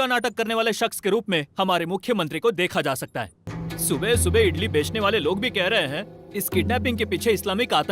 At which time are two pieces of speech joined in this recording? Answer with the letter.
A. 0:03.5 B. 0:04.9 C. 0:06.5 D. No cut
A